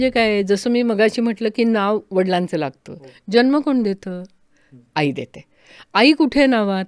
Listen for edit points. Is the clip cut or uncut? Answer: uncut